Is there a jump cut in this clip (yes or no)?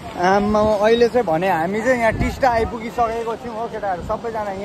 no